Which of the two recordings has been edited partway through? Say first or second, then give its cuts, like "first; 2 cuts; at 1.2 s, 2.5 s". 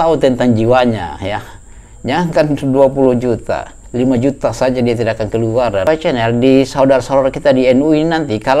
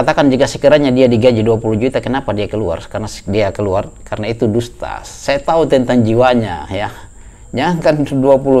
first; 1 cut; at 5.8 s